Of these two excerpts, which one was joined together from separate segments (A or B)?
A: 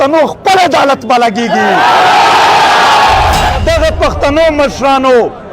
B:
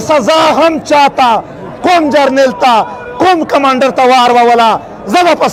A